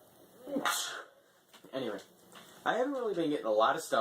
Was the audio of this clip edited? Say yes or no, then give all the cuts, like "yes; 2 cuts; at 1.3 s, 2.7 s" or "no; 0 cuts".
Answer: yes; 1 cut; at 3.1 s